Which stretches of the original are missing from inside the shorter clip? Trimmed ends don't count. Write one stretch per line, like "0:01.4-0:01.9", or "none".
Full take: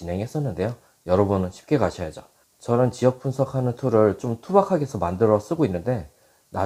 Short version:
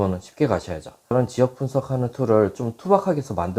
0:02.4-0:02.8